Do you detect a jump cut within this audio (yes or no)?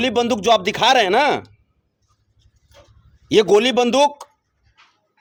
no